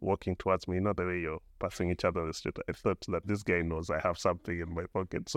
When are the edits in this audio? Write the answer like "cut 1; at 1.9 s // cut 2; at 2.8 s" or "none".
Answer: none